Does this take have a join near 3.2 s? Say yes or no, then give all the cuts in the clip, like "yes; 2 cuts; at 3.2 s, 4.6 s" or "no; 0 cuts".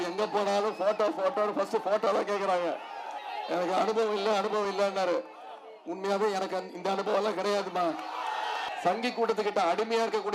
yes; 2 cuts; at 3.2 s, 8.7 s